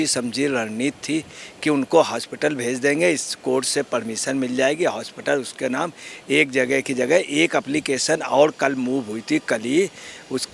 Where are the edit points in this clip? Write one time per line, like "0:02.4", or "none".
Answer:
none